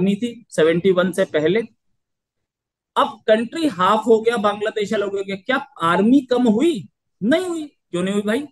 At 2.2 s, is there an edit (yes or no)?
no